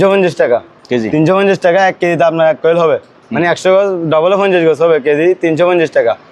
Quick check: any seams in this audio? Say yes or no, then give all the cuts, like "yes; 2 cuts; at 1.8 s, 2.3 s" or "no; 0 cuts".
no; 0 cuts